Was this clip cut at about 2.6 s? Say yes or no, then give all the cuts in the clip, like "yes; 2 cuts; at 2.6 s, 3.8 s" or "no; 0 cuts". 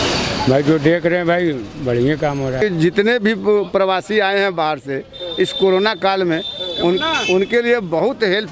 yes; 1 cut; at 2.6 s